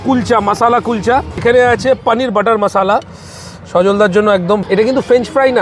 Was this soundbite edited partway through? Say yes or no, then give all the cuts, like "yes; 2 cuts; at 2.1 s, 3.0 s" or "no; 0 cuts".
yes; 2 cuts; at 1.3 s, 4.6 s